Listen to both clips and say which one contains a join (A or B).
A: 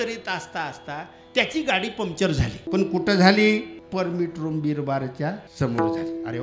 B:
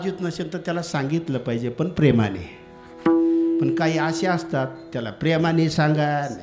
A